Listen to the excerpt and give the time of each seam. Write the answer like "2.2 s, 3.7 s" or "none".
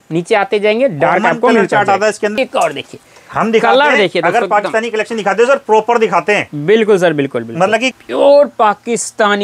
2.4 s, 8.0 s